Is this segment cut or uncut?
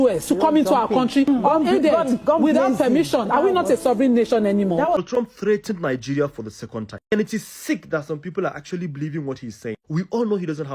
cut